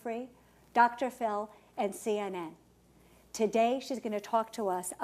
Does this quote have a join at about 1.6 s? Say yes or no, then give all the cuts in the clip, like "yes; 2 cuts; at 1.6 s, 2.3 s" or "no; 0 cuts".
no; 1 cut; at 2.8 s